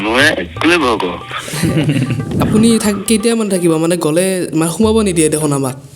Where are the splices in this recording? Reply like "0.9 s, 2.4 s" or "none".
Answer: 2.3 s